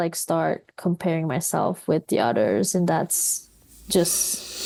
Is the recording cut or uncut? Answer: uncut